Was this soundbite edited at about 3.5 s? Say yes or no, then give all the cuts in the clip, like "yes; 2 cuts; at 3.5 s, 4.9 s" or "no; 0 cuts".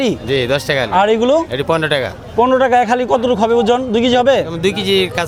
no; 0 cuts